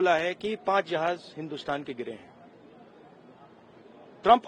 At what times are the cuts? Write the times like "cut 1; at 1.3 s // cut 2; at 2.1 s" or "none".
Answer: none